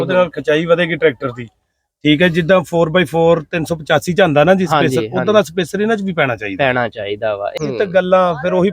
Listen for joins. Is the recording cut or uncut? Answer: cut